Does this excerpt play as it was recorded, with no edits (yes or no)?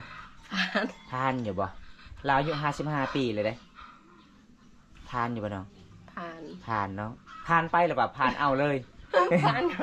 yes